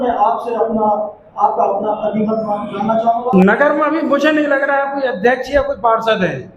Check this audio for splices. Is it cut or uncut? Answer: cut